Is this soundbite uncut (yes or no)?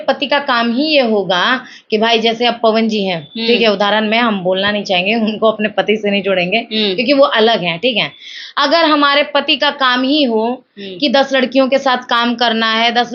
yes